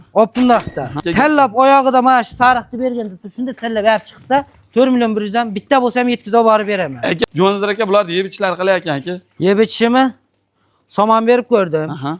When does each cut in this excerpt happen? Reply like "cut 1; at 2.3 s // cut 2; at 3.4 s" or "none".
cut 1; at 0.9 s // cut 2; at 7.2 s

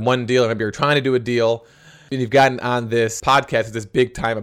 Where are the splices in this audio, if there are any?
cut 1; at 2.1 s

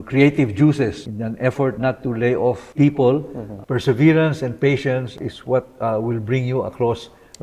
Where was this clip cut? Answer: cut 1; at 1.0 s // cut 2; at 2.7 s // cut 3; at 3.5 s // cut 4; at 5.1 s

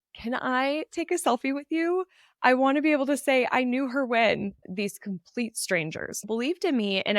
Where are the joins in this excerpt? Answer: cut 1; at 4.6 s // cut 2; at 6.2 s

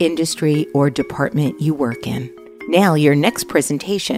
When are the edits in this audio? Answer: none

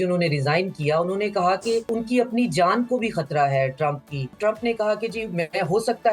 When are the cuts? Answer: cut 1; at 1.9 s // cut 2; at 4.3 s

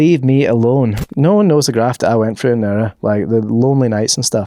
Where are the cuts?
cut 1; at 1.0 s

